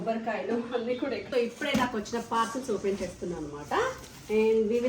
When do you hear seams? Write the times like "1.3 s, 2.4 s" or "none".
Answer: 1.2 s